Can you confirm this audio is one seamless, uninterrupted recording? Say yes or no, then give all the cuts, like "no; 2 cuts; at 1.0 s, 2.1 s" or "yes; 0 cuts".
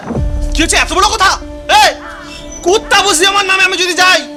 yes; 0 cuts